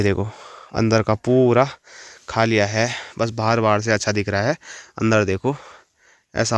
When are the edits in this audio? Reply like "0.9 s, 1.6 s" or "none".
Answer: none